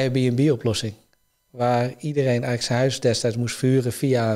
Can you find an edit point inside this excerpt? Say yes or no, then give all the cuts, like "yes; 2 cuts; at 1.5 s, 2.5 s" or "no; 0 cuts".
no; 0 cuts